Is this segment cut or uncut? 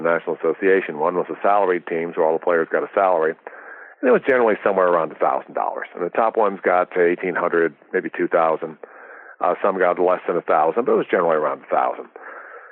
uncut